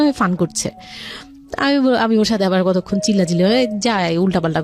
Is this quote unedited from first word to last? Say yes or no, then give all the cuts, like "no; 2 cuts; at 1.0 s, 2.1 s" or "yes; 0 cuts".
yes; 0 cuts